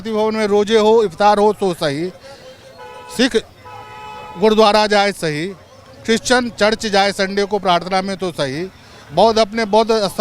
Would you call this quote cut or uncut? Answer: uncut